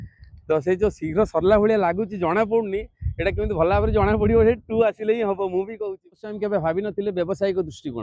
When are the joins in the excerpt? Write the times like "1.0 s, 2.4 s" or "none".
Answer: 6.2 s